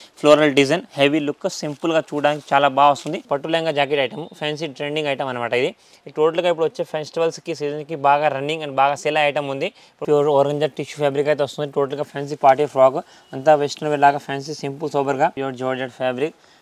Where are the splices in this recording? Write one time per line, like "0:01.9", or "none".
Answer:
0:03.2
0:10.0
0:15.4